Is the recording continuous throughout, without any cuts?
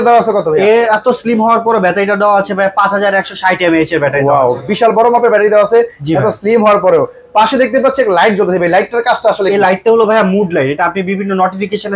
yes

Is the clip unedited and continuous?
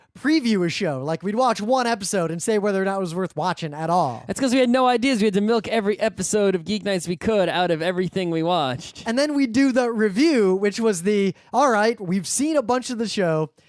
yes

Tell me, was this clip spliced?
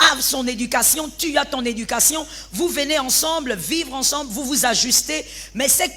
no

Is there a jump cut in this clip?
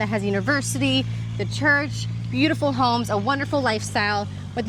no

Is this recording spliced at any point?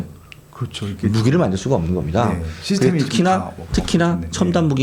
no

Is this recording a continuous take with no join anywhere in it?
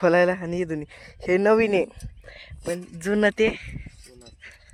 yes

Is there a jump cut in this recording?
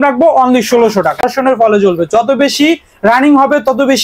yes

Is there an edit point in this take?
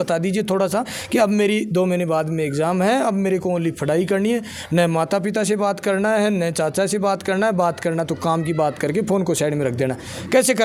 no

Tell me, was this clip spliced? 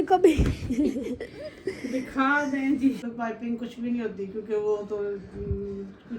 yes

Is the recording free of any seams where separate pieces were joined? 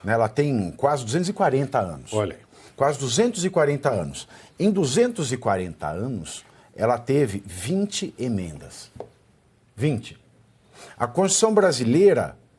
yes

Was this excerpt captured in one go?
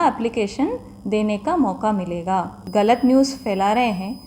no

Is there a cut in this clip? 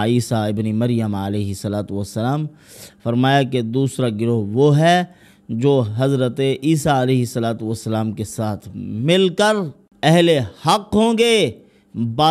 yes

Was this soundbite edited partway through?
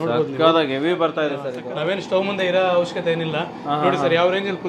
yes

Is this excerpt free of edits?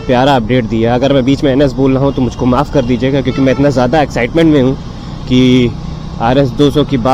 yes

